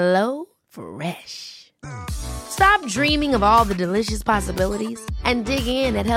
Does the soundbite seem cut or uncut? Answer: uncut